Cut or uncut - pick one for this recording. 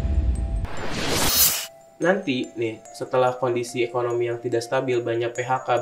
cut